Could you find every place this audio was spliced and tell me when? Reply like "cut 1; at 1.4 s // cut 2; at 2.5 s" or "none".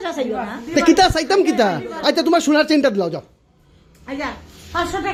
none